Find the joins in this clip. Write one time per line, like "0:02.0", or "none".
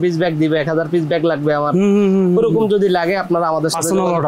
none